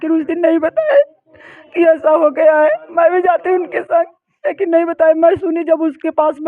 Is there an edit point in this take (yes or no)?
no